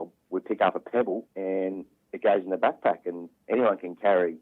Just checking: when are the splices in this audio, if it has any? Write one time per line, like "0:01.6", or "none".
0:01.3
0:03.4

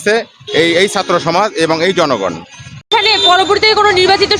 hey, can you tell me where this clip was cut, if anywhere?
0:02.8

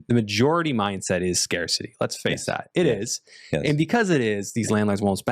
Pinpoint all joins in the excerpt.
none

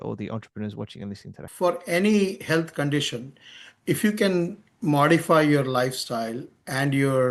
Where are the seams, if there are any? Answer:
0:01.4

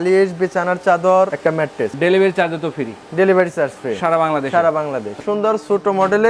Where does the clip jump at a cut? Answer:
0:01.8
0:05.2

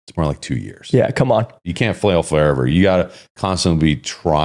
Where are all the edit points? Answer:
0:01.7

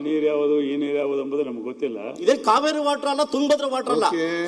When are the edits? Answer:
0:02.2

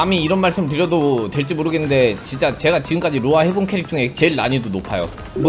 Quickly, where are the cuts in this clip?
none

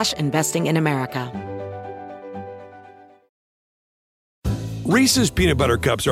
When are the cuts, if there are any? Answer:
0:01.3

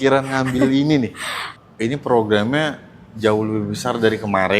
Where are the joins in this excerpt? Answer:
0:01.5

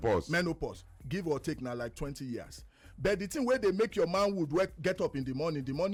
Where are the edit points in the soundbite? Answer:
none

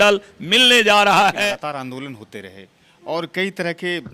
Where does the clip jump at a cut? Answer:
0:01.5

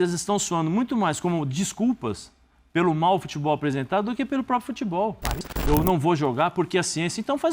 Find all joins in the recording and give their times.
0:05.5

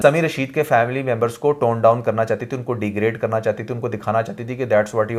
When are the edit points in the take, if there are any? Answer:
none

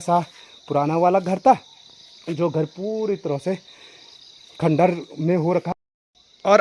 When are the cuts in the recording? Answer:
0:05.7

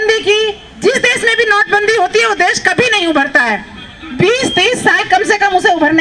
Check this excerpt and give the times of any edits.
none

